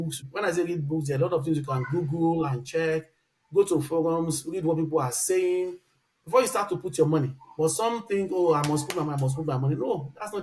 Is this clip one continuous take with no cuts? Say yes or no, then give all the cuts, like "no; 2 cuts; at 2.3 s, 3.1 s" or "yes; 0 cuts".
yes; 0 cuts